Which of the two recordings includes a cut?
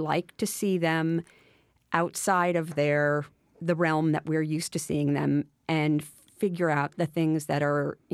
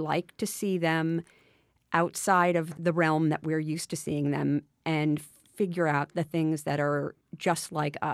second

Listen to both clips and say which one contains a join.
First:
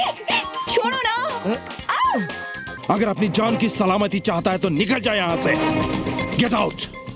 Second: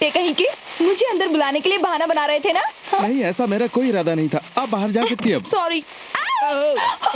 first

